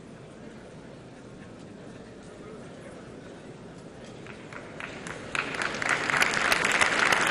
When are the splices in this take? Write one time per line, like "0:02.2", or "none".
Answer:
none